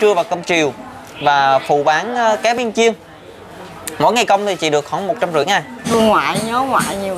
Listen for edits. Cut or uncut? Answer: cut